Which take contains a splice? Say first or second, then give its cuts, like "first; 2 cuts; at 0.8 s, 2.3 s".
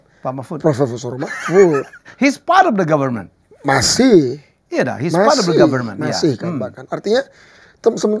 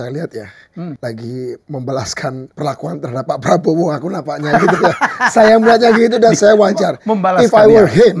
second; 3 cuts; at 1.0 s, 1.6 s, 2.5 s